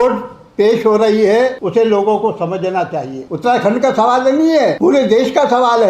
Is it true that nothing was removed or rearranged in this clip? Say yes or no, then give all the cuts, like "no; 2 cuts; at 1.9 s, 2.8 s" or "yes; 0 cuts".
no; 3 cuts; at 1.6 s, 3.2 s, 4.8 s